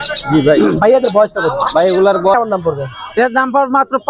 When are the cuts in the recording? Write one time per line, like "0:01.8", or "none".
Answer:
0:02.3